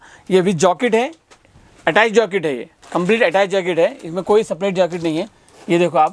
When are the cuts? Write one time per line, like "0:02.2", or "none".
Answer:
none